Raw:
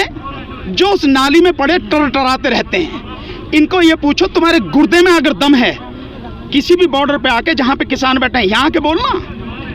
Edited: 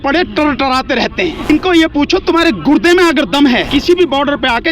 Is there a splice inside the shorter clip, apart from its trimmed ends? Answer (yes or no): yes